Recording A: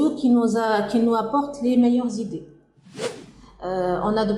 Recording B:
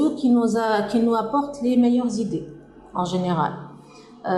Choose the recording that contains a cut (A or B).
A